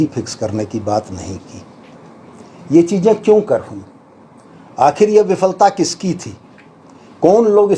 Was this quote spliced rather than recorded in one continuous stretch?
no; 0 cuts

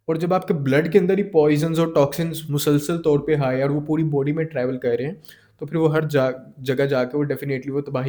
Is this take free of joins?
yes; 0 cuts

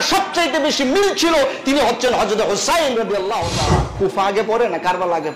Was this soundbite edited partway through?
yes; 1 cut; at 3.9 s

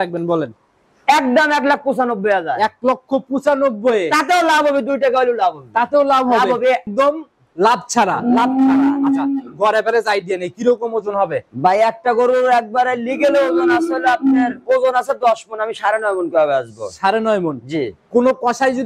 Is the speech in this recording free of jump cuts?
no; 1 cut; at 6.9 s

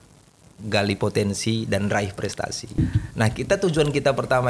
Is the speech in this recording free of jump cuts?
no; 1 cut; at 2.8 s

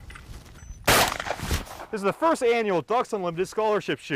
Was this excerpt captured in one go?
yes; 0 cuts

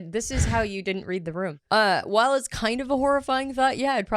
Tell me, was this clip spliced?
yes; 1 cut; at 1.6 s

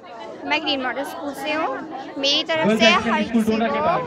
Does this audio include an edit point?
no; 0 cuts

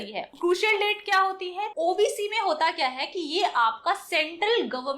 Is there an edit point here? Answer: yes; 1 cut; at 1.6 s

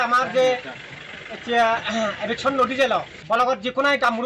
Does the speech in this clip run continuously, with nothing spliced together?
no; 1 cut; at 3.2 s

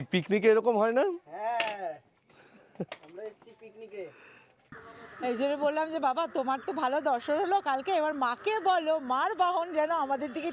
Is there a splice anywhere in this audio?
yes; 1 cut; at 4.8 s

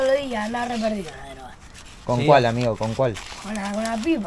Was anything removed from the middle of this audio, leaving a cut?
no; 0 cuts

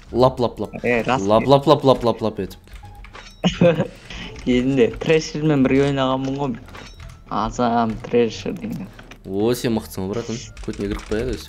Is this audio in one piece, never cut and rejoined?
no; 1 cut; at 10.5 s

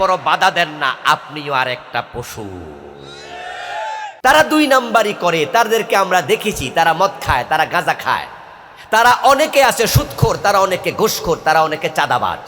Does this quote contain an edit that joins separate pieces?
yes; 1 cut; at 4.1 s

